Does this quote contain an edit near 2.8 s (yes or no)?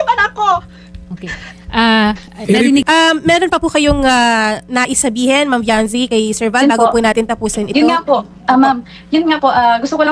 yes